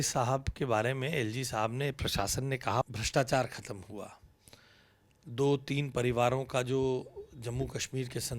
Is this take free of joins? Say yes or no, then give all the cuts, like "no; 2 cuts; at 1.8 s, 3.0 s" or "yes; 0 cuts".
no; 1 cut; at 2.8 s